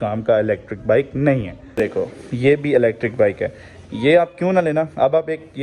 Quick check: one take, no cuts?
no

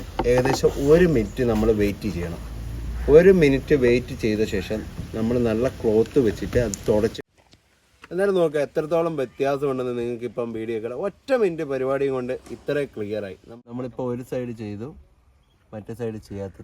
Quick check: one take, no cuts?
no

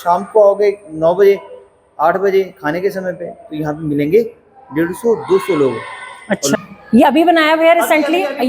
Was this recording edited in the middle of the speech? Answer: yes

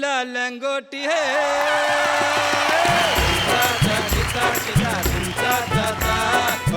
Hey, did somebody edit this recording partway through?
yes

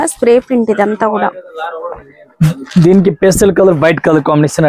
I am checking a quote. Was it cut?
no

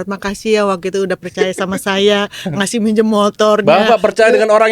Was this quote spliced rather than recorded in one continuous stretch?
no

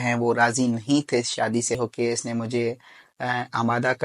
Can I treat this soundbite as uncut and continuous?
no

